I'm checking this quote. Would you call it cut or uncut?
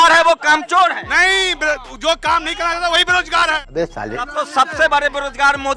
cut